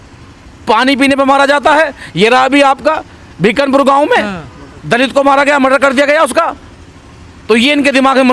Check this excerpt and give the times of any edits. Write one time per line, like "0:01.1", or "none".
none